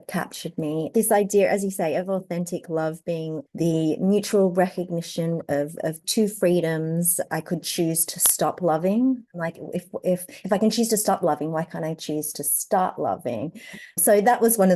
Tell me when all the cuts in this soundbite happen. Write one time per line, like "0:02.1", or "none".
0:00.9
0:03.4
0:07.3
0:09.3